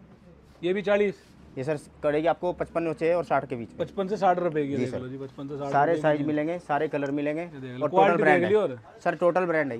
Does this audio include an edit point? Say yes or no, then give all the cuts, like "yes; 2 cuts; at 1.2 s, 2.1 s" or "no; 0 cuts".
no; 0 cuts